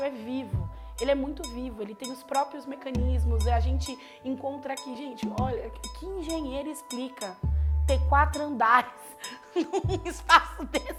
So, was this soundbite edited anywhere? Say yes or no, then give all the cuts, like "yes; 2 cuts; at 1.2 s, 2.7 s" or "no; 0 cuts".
no; 0 cuts